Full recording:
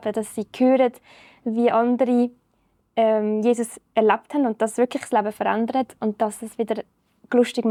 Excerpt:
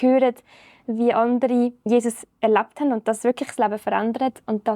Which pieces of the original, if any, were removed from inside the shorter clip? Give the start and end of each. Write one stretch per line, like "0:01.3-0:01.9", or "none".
0:02.4-0:03.4